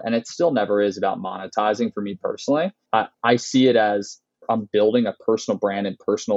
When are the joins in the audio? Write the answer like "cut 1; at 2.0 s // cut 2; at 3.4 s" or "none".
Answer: cut 1; at 2.8 s